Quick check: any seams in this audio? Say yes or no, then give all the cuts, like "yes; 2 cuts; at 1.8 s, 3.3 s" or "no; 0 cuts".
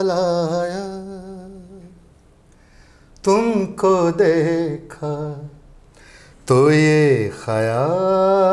no; 0 cuts